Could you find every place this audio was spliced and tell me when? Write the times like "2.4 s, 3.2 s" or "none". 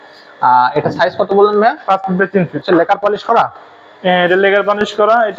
2.6 s